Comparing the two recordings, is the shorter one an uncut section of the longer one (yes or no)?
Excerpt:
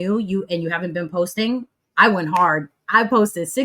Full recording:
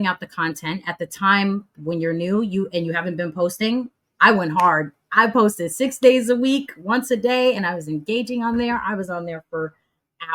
yes